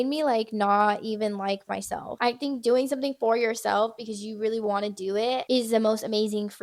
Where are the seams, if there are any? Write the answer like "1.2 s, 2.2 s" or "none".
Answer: 2.2 s, 5.4 s